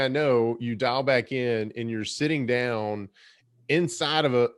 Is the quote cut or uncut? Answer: uncut